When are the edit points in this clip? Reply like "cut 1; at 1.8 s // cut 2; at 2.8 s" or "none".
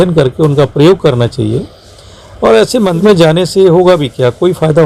none